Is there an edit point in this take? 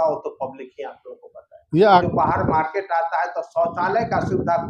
yes; 1 cut; at 2.0 s

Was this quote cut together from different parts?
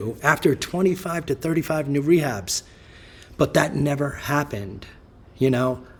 no; 0 cuts

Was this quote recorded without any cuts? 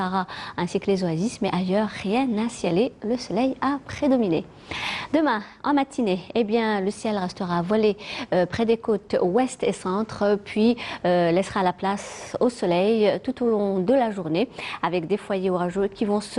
no; 1 cut; at 6.1 s

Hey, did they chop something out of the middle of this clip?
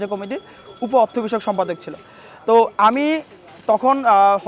no; 0 cuts

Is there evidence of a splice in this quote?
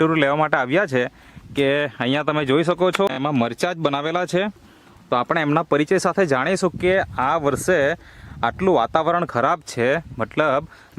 yes; 1 cut; at 3.1 s

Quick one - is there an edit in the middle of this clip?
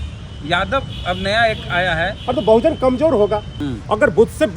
yes; 1 cut; at 3.6 s

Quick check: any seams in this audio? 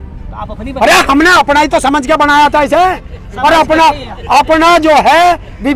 no; 0 cuts

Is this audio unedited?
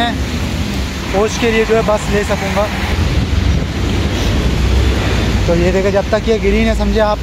yes; 0 cuts

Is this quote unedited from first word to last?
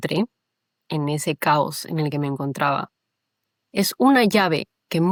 yes; 0 cuts

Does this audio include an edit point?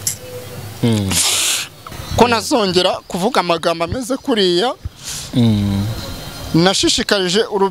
yes; 1 cut; at 2.1 s

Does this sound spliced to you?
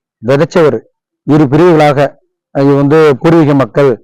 no; 0 cuts

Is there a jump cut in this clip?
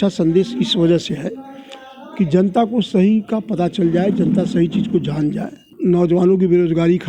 yes; 1 cut; at 5.7 s

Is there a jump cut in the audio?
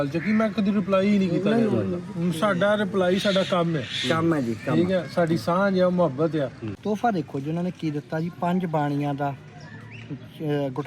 yes; 1 cut; at 6.7 s

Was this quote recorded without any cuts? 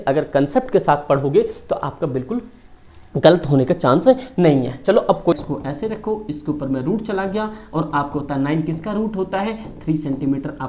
no; 1 cut; at 5.4 s

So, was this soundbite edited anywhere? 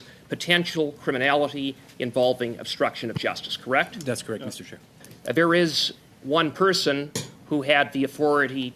yes; 2 cuts; at 3.9 s, 5.1 s

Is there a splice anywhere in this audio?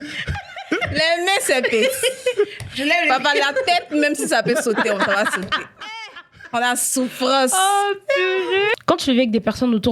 yes; 1 cut; at 8.7 s

